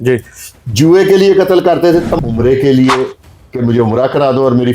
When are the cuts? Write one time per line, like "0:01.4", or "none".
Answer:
0:02.1